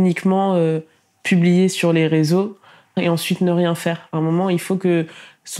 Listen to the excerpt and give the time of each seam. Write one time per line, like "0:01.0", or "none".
0:02.9